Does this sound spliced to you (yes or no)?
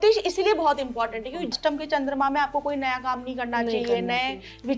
yes